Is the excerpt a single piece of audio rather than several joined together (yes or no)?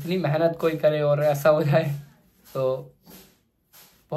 yes